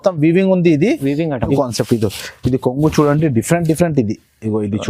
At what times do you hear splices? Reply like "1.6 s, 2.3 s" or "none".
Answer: 1.5 s